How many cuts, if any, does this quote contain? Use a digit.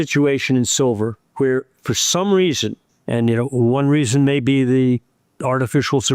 2